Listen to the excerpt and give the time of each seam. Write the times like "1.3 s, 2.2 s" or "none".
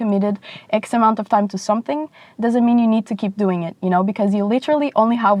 none